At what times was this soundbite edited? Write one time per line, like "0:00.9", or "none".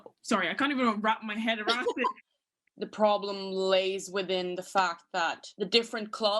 0:02.6
0:05.4